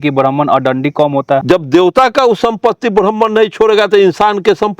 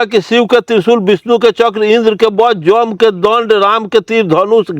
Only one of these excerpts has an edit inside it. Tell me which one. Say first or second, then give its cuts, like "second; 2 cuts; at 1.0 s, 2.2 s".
first; 1 cut; at 1.4 s